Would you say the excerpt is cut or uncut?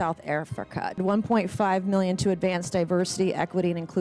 cut